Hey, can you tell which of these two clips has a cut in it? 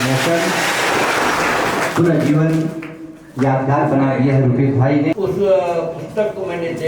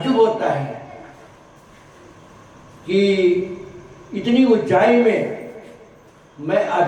first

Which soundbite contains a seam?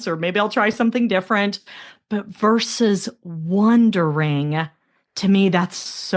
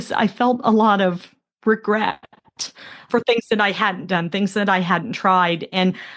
second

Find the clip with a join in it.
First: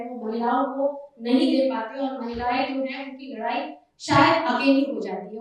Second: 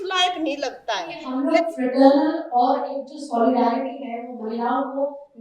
second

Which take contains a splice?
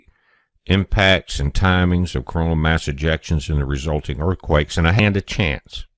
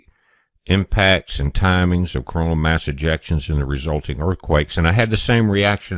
second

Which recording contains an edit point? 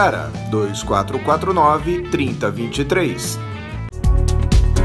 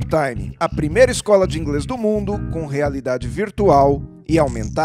first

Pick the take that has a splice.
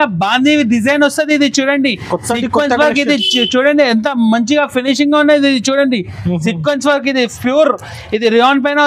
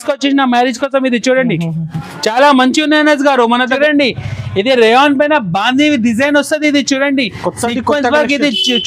second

